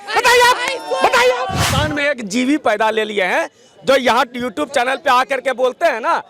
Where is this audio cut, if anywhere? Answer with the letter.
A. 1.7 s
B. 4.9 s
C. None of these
A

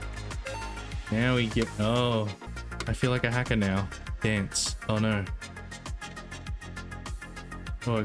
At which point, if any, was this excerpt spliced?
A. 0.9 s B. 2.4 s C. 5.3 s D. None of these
B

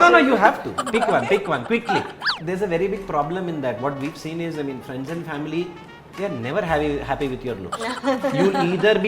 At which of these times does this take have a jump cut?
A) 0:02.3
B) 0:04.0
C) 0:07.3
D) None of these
A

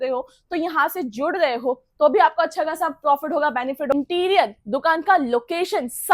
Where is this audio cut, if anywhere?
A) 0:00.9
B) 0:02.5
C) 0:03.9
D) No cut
C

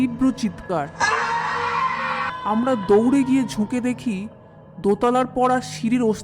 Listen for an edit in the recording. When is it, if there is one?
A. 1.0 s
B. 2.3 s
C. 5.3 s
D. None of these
B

